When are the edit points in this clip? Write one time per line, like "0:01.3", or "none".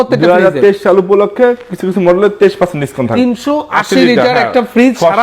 0:03.1

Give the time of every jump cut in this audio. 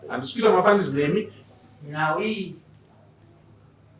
0:01.4

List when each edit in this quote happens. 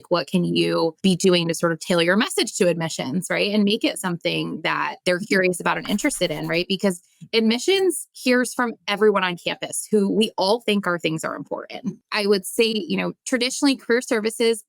0:01.0
0:04.9
0:12.0
0:13.2

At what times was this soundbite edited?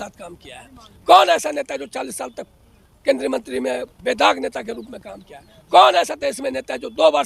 none

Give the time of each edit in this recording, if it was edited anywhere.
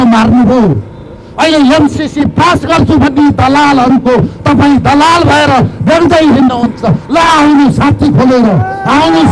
none

